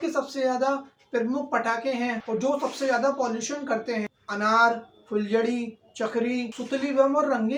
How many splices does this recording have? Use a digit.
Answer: 0